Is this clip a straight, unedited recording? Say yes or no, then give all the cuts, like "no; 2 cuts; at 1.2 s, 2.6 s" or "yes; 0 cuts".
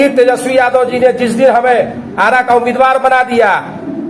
yes; 0 cuts